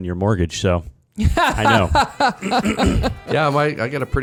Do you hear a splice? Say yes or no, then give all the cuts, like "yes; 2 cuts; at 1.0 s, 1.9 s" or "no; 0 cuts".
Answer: no; 0 cuts